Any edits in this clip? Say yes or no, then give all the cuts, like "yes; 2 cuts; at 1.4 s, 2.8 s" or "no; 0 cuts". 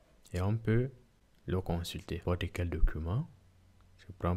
yes; 1 cut; at 2.2 s